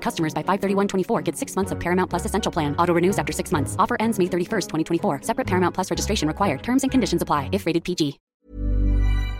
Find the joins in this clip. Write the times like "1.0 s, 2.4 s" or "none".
8.2 s